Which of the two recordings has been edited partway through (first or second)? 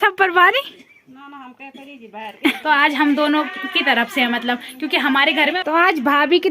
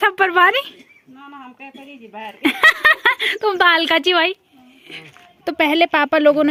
first